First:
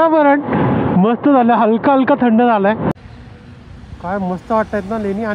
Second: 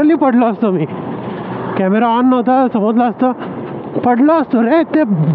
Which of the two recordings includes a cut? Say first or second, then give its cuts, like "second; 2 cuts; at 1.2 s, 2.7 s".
first; 1 cut; at 3.0 s